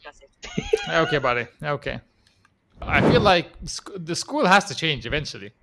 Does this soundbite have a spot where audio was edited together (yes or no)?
yes